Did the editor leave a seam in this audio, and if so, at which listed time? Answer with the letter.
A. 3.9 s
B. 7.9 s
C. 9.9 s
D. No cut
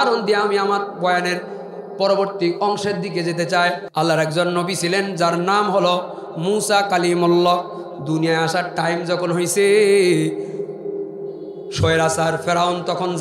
A